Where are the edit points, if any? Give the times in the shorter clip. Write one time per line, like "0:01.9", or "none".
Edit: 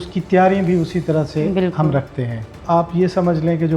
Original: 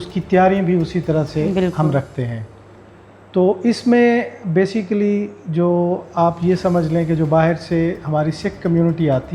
0:02.6